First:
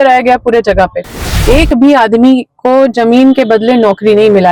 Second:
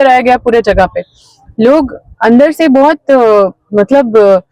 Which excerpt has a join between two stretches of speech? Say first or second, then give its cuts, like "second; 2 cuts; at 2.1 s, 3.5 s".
first; 1 cut; at 1.3 s